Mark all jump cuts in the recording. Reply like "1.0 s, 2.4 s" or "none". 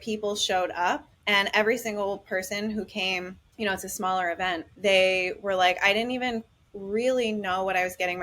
1.1 s, 3.4 s, 4.7 s